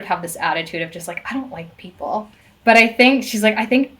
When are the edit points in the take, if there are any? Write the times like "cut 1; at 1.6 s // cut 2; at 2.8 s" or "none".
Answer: cut 1; at 2.4 s